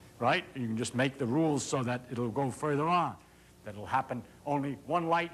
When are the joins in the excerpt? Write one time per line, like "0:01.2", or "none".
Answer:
0:02.3